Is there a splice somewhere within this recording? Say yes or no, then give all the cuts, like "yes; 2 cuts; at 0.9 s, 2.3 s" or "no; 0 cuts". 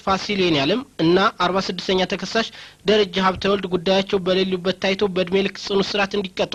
no; 0 cuts